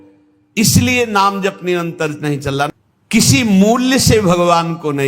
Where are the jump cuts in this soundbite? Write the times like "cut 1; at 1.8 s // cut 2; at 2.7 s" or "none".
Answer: cut 1; at 2.7 s